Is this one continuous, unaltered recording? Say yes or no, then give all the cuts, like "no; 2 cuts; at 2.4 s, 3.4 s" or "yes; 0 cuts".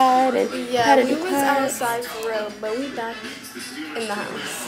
yes; 0 cuts